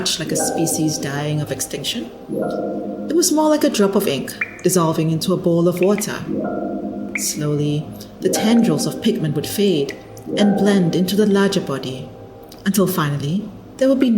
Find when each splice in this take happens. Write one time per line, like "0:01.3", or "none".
0:02.2
0:03.1
0:06.2
0:07.4